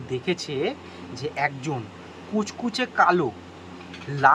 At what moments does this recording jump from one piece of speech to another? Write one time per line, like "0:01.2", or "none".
none